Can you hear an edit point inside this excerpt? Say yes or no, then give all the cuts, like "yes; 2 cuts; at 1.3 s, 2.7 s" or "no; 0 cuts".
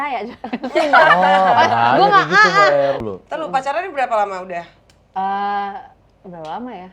yes; 1 cut; at 3.0 s